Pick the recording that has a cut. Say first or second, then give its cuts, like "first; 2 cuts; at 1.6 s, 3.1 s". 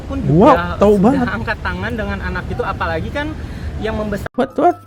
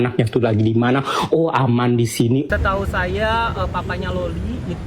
second; 1 cut; at 2.5 s